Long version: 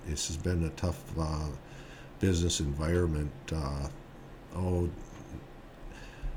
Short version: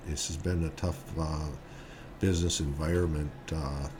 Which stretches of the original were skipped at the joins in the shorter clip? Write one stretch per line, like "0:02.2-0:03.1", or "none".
none